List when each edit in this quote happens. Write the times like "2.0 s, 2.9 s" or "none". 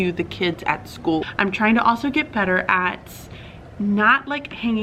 1.3 s